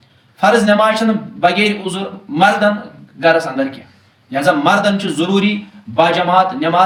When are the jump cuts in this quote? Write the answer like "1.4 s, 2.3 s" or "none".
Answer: none